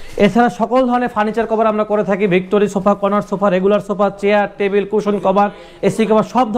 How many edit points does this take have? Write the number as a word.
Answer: zero